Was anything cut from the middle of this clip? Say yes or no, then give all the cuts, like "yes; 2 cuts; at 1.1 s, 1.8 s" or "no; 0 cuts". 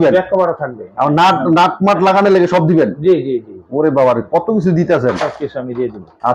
no; 0 cuts